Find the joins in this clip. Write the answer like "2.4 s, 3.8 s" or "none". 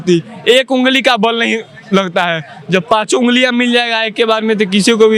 none